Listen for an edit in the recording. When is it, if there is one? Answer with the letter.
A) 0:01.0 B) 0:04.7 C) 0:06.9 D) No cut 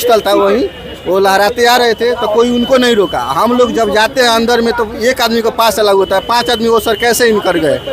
D